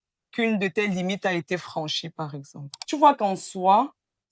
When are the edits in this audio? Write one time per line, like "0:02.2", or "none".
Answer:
0:02.7